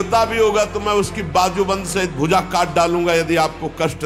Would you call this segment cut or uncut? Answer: uncut